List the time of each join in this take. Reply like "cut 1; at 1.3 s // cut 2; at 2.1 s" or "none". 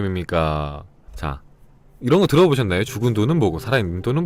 cut 1; at 2.9 s